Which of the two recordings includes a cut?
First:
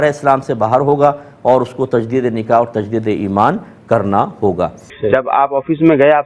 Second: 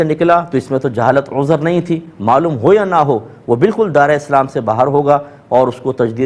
first; 1 cut; at 4.9 s

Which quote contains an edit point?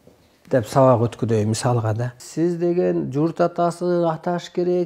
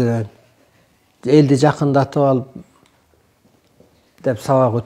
first; 1 cut; at 2.2 s

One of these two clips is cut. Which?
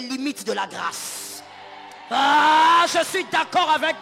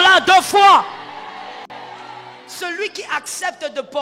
second; 1 cut; at 2.5 s

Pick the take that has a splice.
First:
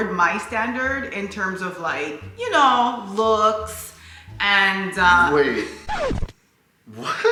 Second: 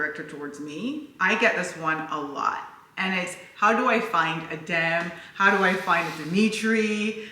second; 1 cut; at 2.7 s

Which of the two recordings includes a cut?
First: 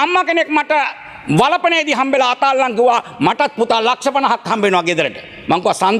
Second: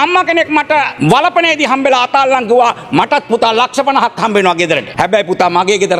second; 2 cuts; at 0.9 s, 4.9 s

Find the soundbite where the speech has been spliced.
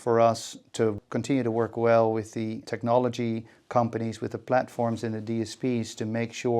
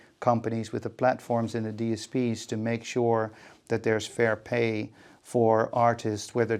first; 2 cuts; at 1.0 s, 2.6 s

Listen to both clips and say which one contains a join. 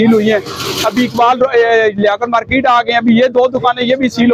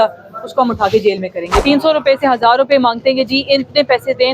second; 1 cut; at 1.6 s

